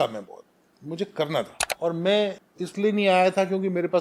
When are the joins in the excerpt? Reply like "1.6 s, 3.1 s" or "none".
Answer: 1.6 s, 2.5 s